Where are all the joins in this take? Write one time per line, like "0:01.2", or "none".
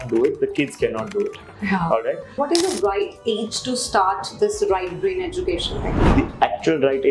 0:02.4
0:05.9